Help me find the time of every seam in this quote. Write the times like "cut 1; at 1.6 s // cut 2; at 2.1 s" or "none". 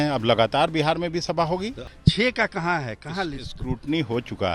cut 1; at 1.9 s